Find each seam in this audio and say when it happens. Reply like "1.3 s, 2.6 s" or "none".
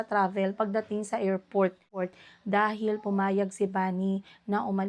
2.0 s